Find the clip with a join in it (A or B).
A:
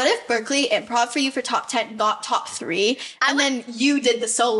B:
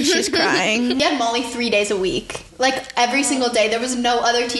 B